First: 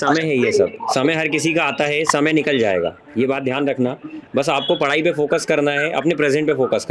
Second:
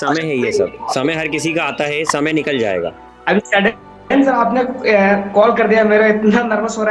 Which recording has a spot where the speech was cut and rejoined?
second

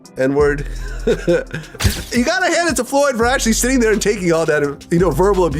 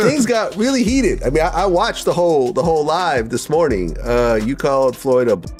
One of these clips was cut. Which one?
first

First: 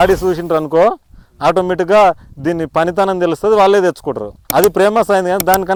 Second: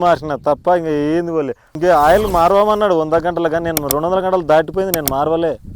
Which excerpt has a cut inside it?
second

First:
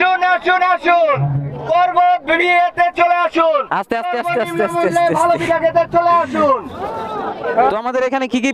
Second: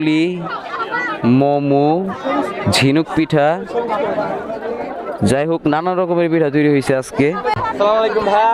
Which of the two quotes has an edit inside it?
second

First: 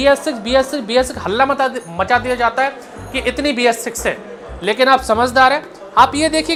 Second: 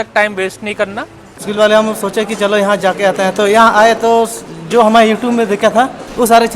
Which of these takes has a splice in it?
second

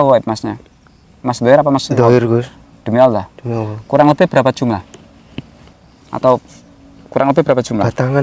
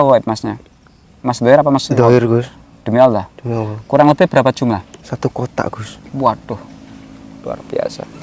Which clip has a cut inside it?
second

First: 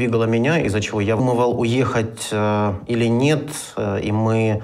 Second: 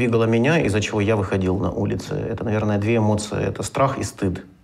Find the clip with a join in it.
second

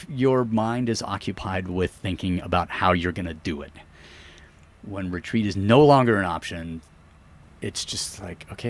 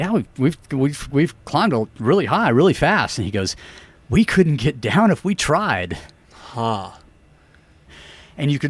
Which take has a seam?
second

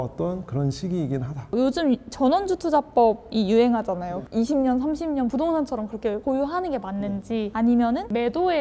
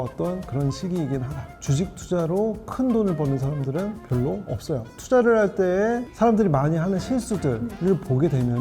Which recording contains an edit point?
second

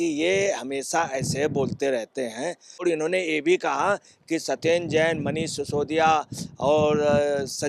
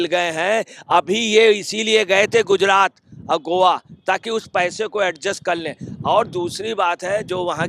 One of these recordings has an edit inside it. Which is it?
first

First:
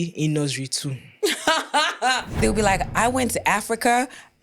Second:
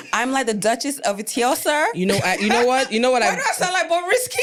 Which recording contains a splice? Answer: first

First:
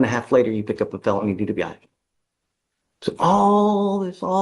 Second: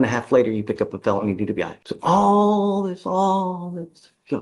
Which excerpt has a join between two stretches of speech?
second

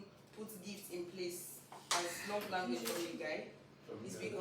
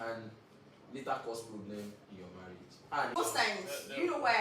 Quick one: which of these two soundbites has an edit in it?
second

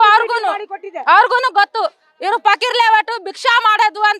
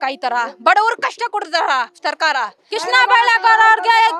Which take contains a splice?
second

